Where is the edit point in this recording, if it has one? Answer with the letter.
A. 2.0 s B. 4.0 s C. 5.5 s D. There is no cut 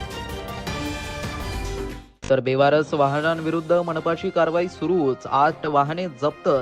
A